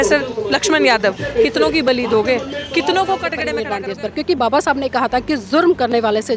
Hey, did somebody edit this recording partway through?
yes; 1 cut; at 3.5 s

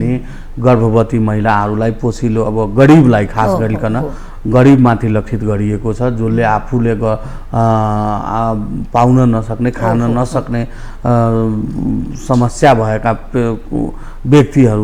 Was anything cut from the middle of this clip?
no; 0 cuts

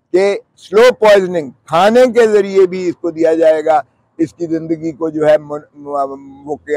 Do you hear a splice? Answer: no; 0 cuts

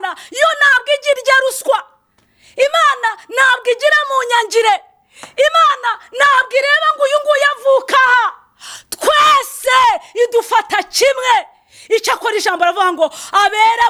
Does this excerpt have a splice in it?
no; 0 cuts

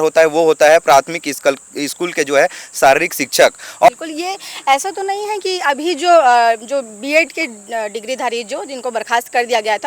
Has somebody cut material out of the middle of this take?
yes; 1 cut; at 3.9 s

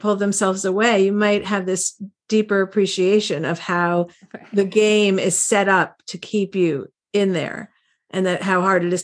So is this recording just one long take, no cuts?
yes; 0 cuts

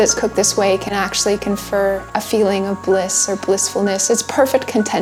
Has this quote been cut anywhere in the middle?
no; 0 cuts

